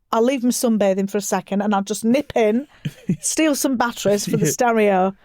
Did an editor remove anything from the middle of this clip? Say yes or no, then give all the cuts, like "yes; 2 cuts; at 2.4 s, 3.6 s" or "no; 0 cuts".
no; 0 cuts